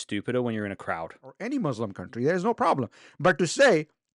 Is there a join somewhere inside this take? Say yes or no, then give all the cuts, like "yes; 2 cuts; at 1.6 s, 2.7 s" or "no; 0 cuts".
yes; 1 cut; at 1.4 s